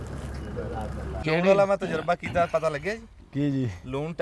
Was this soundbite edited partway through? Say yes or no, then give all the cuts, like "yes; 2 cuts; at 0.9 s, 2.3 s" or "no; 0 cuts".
yes; 1 cut; at 1.2 s